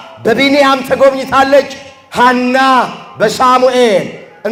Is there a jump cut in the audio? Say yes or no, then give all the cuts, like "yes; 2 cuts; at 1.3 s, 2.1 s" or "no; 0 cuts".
no; 0 cuts